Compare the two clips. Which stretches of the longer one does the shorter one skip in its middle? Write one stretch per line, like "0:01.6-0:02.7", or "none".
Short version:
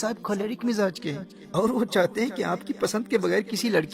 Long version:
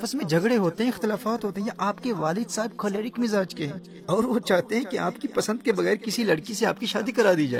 none